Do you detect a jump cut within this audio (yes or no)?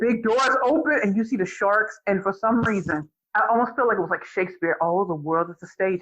yes